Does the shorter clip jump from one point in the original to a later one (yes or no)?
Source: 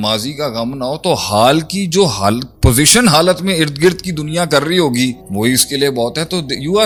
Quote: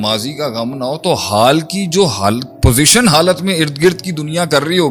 no